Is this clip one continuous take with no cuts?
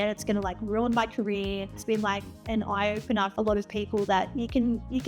no; 2 cuts; at 1.8 s, 3.3 s

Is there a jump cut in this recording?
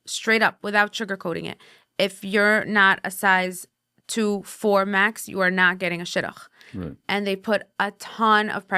no; 0 cuts

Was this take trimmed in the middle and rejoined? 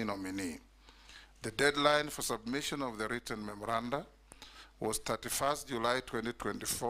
no; 0 cuts

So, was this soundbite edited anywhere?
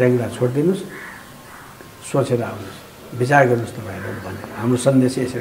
no; 0 cuts

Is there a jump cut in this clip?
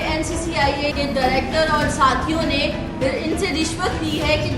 yes; 1 cut; at 0.9 s

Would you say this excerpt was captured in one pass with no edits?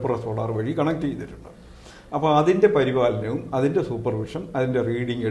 yes; 0 cuts

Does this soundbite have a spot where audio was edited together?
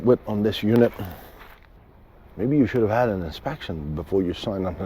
yes; 1 cut; at 1.6 s

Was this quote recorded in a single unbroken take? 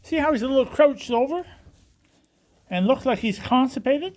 yes; 0 cuts

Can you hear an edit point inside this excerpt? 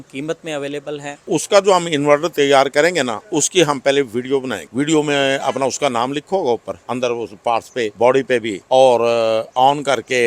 yes; 5 cuts; at 1.2 s, 4.6 s, 6.8 s, 7.9 s, 8.6 s

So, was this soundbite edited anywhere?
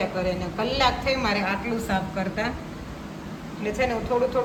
no; 0 cuts

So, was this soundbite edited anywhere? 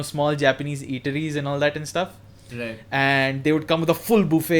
no; 0 cuts

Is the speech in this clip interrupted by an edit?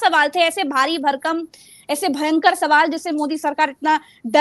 no; 0 cuts

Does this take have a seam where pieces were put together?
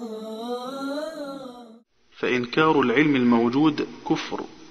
no; 0 cuts

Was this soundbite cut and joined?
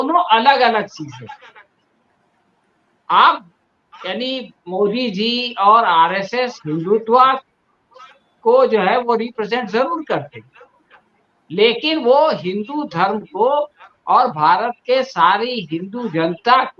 no; 0 cuts

